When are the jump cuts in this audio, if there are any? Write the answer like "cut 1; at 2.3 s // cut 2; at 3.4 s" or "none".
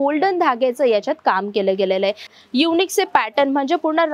cut 1; at 2.4 s